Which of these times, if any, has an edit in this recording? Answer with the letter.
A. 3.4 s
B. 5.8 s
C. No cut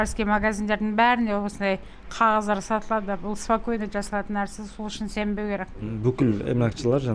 B